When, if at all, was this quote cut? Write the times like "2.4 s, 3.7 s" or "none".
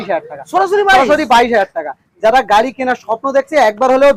none